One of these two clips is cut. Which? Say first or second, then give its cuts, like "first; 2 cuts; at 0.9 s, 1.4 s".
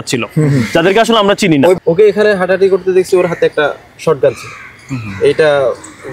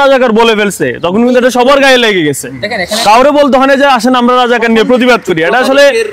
first; 1 cut; at 1.8 s